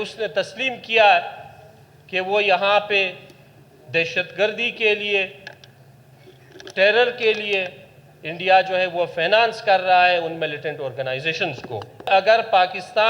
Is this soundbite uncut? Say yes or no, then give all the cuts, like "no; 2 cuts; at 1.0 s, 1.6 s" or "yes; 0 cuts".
no; 1 cut; at 12.1 s